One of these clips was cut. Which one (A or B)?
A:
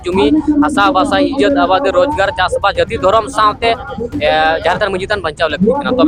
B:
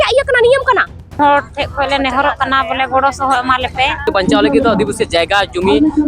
B